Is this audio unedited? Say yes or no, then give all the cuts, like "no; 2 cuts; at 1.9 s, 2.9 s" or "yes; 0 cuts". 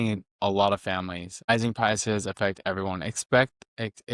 no; 1 cut; at 1.5 s